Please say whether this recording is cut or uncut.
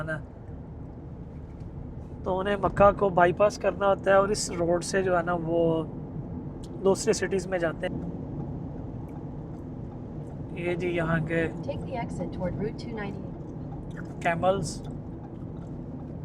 cut